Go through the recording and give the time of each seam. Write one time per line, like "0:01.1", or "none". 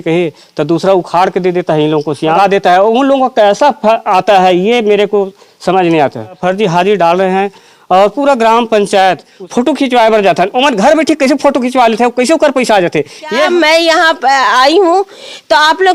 0:02.4
0:06.4
0:09.4
0:13.4